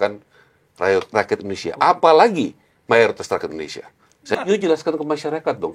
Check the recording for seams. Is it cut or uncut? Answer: cut